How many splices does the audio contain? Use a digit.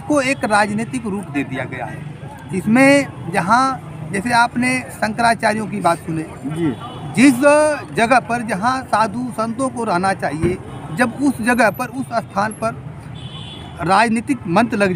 0